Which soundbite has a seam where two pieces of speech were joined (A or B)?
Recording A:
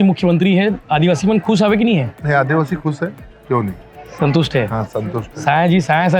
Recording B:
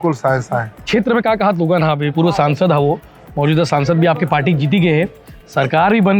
B